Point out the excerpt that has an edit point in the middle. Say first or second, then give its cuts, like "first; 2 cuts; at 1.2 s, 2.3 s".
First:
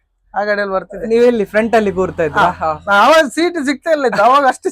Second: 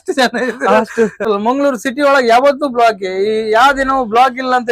second; 1 cut; at 1.3 s